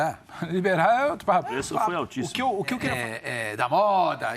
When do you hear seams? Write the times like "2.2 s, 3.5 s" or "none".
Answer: 2.9 s